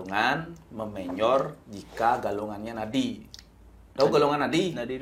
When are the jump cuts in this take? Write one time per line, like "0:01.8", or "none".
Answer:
none